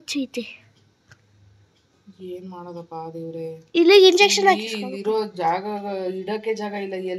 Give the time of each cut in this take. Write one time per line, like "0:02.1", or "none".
none